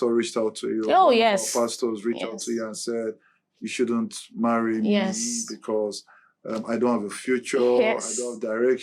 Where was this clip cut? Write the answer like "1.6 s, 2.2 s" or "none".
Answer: none